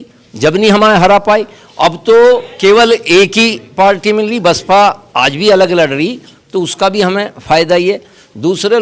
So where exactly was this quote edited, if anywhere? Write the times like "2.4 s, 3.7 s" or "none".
none